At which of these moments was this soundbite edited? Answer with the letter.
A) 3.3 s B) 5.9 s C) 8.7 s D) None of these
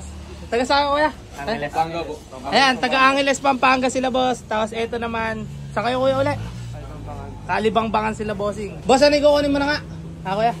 C